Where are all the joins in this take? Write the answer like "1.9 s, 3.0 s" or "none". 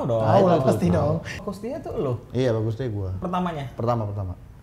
1.5 s